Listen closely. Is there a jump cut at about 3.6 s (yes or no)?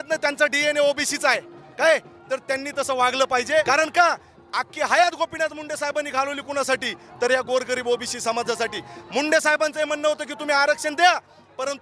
yes